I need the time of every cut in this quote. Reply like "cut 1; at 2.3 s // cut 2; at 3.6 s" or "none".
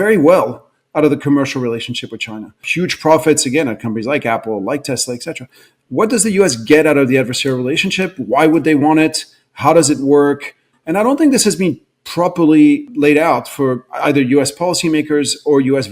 cut 1; at 2.6 s // cut 2; at 12.9 s